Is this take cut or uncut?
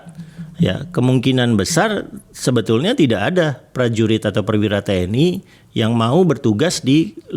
uncut